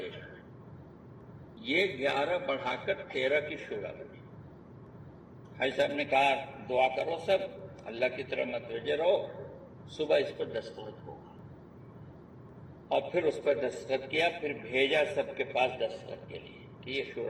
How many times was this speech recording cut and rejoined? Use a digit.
2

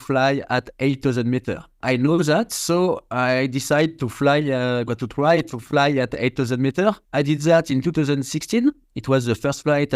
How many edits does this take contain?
2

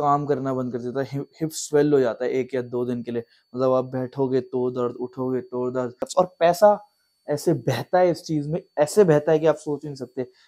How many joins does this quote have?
1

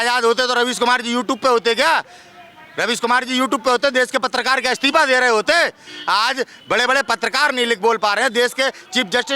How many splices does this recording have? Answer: 0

